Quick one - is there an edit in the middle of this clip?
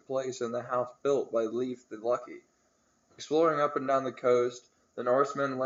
no; 0 cuts

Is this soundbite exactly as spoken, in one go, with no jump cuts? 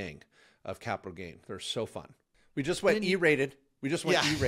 no; 1 cut; at 2.5 s

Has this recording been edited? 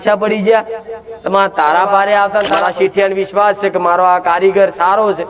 yes; 1 cut; at 2.5 s

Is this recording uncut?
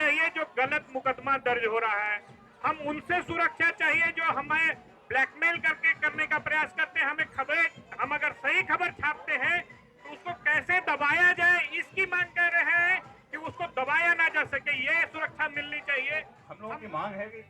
no; 1 cut; at 16.5 s

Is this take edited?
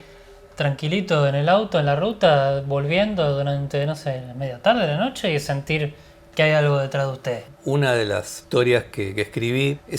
yes; 2 cuts; at 7.5 s, 8.4 s

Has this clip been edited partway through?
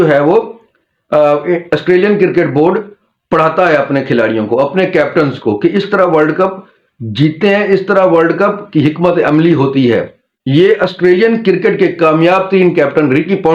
no; 0 cuts

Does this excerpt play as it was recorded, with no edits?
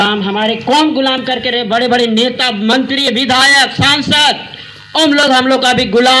yes; 0 cuts

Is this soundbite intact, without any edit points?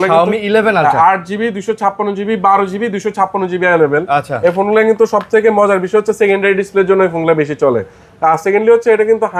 yes; 0 cuts

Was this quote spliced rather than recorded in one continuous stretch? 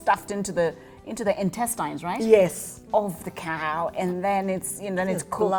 no; 0 cuts

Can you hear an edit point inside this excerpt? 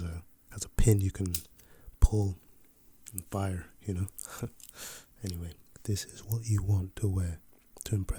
yes; 1 cut; at 5.7 s

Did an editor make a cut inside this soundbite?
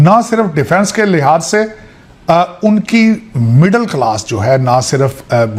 no; 0 cuts

